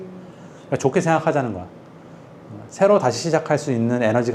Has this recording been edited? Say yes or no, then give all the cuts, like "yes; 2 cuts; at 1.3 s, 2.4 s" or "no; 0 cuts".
no; 0 cuts